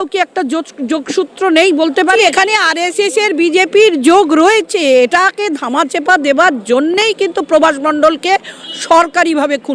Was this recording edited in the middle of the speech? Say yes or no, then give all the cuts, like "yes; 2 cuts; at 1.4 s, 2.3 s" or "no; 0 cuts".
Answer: yes; 1 cut; at 2.2 s